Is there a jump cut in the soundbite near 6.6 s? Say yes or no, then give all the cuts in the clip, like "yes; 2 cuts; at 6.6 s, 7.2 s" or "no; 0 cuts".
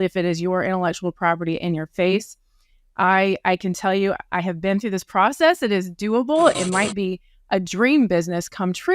yes; 1 cut; at 6.6 s